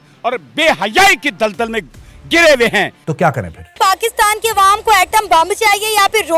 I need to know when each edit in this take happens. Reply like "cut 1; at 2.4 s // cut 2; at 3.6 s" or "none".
cut 1; at 3.5 s